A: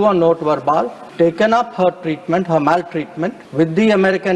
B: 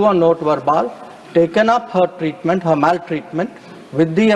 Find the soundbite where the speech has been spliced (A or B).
A